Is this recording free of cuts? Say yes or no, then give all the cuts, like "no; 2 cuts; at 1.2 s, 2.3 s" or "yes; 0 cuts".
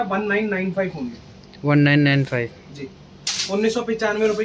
yes; 0 cuts